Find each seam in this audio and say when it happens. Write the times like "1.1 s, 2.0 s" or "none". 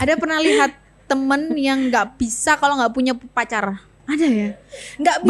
3.9 s